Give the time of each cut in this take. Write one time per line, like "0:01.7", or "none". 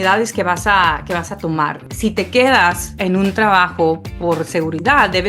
0:01.8
0:02.9